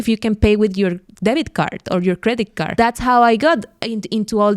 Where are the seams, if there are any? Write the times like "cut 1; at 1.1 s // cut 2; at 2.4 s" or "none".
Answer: cut 1; at 2.8 s